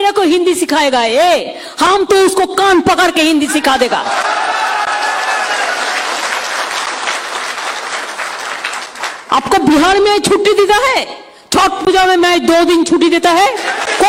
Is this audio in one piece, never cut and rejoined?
yes; 0 cuts

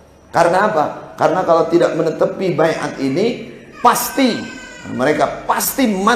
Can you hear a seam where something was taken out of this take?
no; 0 cuts

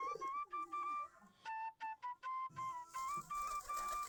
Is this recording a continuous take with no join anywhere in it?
yes; 0 cuts

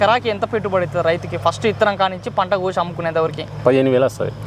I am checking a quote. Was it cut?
no; 0 cuts

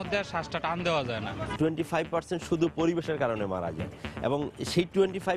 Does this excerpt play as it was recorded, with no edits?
no; 1 cut; at 1.5 s

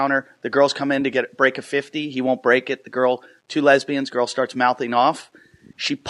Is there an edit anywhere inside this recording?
yes; 1 cut; at 2.9 s

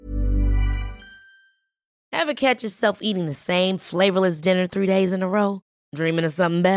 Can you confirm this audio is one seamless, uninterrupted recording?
no; 1 cut; at 2.1 s

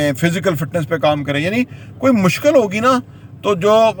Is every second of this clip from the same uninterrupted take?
yes; 0 cuts

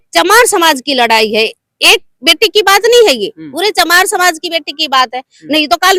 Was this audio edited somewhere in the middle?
no; 0 cuts

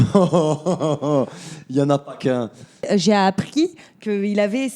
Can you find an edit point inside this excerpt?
yes; 1 cut; at 2.9 s

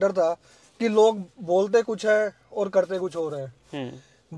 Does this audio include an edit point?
no; 0 cuts

